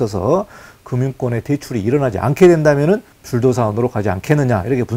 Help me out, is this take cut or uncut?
cut